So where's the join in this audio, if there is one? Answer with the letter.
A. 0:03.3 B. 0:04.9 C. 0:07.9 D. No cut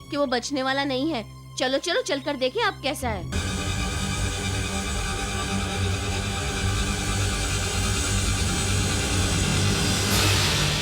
A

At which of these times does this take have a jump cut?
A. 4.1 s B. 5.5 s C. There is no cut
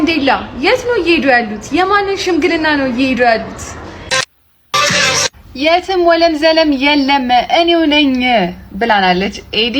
A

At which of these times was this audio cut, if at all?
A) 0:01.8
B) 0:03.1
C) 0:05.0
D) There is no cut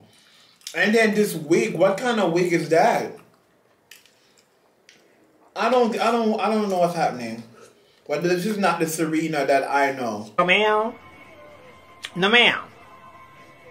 D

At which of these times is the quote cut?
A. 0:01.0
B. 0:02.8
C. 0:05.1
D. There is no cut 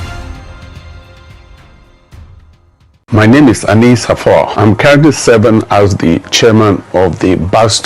B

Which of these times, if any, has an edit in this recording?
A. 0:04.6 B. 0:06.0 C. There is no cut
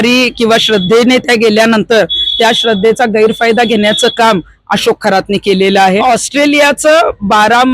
B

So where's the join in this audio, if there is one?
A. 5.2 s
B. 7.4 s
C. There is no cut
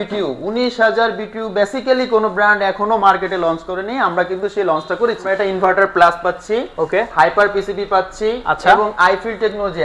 A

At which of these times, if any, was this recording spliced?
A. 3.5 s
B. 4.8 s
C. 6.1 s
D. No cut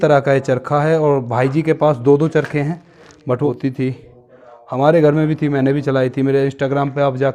A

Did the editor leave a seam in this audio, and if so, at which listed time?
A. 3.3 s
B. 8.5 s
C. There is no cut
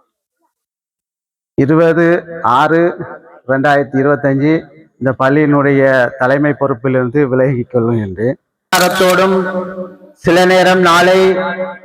B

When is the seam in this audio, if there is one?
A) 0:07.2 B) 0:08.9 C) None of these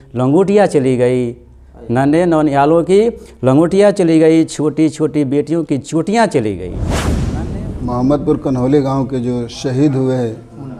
A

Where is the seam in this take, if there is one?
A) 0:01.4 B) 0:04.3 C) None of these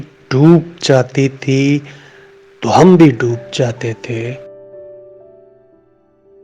B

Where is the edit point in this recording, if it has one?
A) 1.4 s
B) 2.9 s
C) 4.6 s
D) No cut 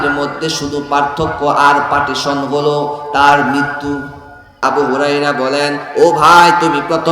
C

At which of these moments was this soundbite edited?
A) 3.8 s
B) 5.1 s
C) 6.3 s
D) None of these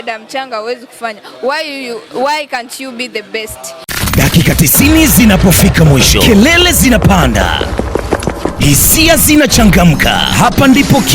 A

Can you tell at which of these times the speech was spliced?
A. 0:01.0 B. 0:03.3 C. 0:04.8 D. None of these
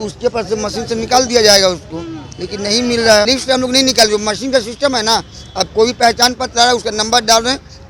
B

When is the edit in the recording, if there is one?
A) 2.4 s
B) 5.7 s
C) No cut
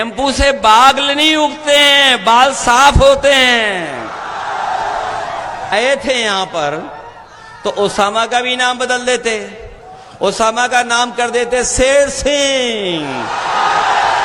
B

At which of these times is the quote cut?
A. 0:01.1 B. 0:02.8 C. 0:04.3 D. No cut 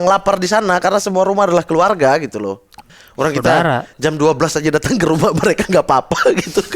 B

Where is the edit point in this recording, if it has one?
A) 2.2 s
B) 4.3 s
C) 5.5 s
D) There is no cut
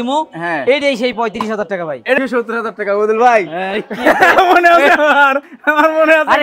A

